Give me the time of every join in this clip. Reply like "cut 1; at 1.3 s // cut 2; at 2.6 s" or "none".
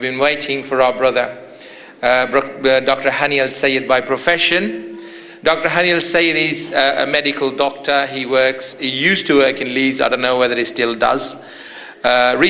none